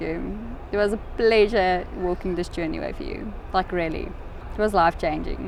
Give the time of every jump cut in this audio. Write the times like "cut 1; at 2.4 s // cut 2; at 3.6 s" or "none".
none